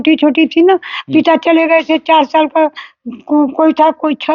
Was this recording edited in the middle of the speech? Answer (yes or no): no